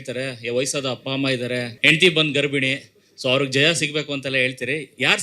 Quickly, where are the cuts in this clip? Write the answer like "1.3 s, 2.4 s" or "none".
1.7 s